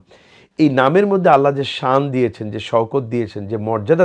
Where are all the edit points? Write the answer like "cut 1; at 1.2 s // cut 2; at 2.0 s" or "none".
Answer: none